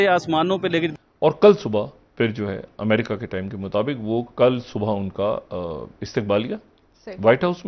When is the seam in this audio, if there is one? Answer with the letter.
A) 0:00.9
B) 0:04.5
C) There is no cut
A